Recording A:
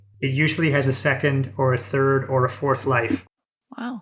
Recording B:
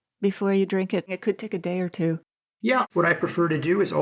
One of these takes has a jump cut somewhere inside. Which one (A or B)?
B